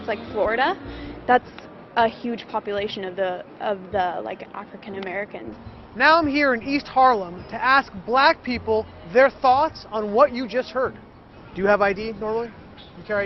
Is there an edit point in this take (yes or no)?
yes